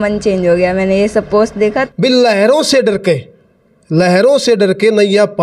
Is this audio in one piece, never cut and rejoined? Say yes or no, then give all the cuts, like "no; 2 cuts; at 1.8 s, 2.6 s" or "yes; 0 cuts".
no; 1 cut; at 1.8 s